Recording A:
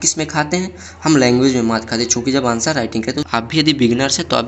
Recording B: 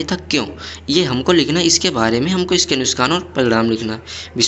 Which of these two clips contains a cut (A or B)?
A